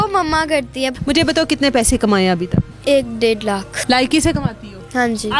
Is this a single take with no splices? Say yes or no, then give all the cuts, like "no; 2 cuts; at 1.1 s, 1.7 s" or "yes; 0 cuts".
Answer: no; 3 cuts; at 0.9 s, 2.7 s, 3.7 s